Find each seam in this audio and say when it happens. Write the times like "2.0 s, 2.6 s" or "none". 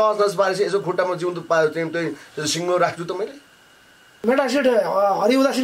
4.2 s